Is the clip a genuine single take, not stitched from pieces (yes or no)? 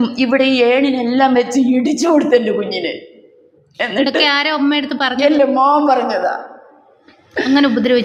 yes